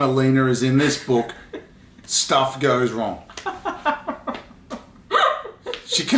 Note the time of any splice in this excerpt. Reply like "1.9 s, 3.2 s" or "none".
none